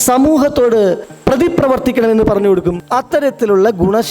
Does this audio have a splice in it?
yes; 1 cut; at 2.8 s

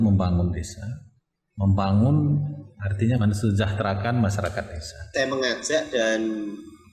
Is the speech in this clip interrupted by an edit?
yes; 2 cuts; at 3.2 s, 5.1 s

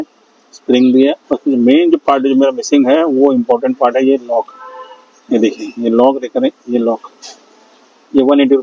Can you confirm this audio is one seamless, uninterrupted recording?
yes; 0 cuts

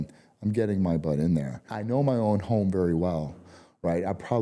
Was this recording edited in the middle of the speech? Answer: yes; 1 cut; at 1.7 s

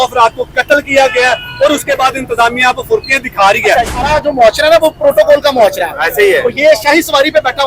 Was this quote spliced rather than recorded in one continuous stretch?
yes; 1 cut; at 4.0 s

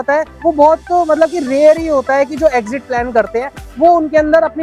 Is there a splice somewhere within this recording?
no; 0 cuts

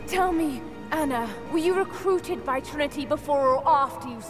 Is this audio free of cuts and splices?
yes; 0 cuts

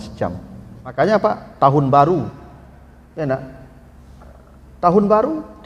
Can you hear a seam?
yes; 1 cut; at 0.9 s

